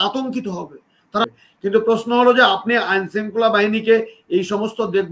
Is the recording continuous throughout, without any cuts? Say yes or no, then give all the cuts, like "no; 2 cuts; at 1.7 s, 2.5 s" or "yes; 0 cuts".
no; 1 cut; at 1.2 s